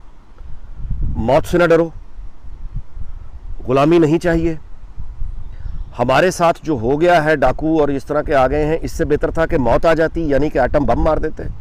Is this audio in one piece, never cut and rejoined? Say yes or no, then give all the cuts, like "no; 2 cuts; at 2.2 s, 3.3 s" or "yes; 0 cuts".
yes; 0 cuts